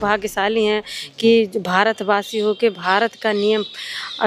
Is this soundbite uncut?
yes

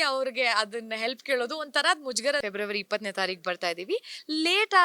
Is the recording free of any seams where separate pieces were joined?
no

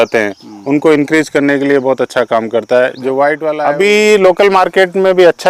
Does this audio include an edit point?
yes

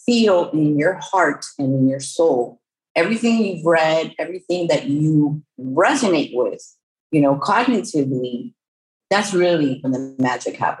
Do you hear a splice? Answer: yes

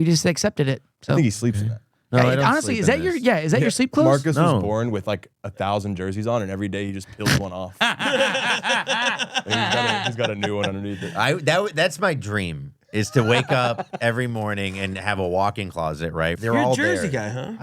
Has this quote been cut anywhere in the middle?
yes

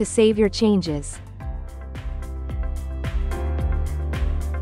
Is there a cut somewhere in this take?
yes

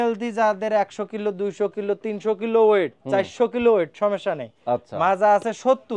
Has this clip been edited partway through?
no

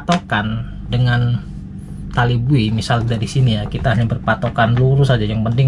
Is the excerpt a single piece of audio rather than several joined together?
yes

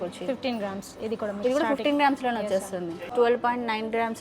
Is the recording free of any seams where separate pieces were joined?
no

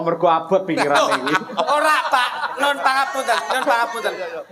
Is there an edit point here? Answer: no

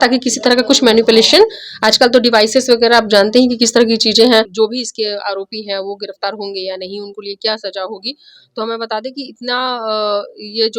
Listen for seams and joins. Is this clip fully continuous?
no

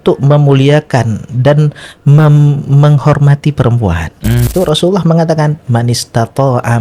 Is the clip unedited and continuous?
no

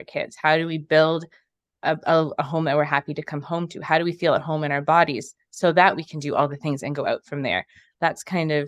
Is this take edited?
no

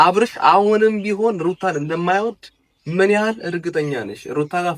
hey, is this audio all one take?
yes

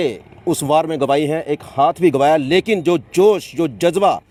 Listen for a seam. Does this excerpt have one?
no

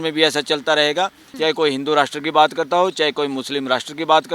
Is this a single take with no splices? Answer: no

